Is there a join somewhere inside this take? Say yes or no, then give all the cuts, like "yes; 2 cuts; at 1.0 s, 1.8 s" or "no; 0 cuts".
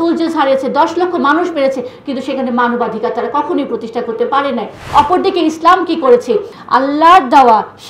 yes; 2 cuts; at 4.8 s, 6.6 s